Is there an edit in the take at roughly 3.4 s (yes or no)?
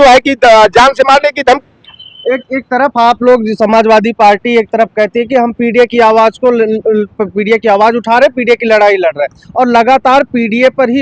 no